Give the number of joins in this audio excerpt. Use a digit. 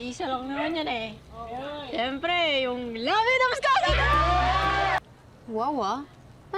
1